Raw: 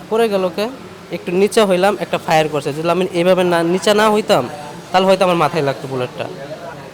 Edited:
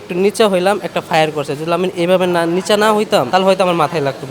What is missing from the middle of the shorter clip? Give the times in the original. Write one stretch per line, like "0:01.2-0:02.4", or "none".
0:04.4-0:04.9